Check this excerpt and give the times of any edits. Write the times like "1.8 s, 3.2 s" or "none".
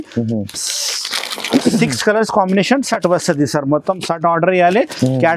none